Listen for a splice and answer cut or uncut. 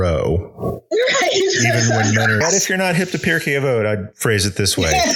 cut